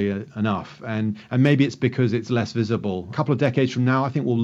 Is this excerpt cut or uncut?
cut